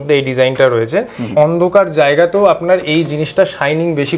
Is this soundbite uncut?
no; 1 cut; at 1.3 s

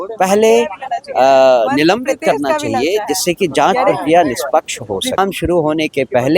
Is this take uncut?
no; 1 cut; at 5.2 s

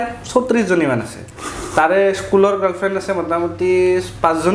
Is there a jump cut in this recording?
no; 0 cuts

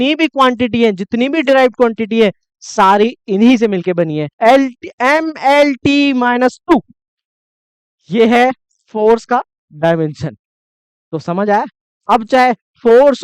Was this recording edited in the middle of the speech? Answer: yes; 1 cut; at 4.3 s

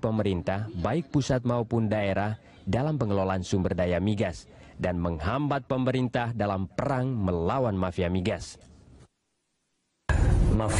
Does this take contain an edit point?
no; 0 cuts

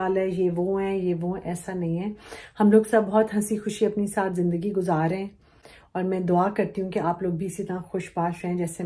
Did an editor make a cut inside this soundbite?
no; 0 cuts

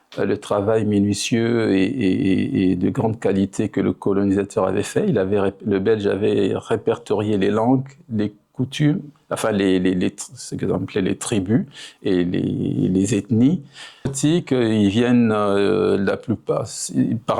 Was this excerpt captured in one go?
no; 1 cut; at 14.1 s

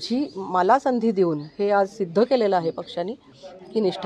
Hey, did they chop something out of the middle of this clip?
no; 0 cuts

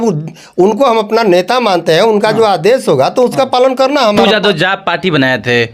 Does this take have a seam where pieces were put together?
yes; 1 cut; at 4.2 s

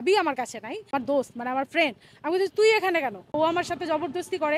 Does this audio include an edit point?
yes; 2 cuts; at 0.9 s, 3.3 s

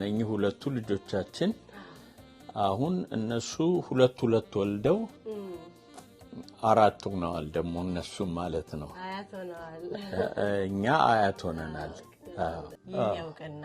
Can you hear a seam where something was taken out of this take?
yes; 1 cut; at 12.8 s

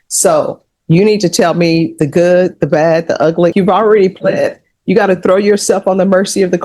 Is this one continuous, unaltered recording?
no; 1 cut; at 3.5 s

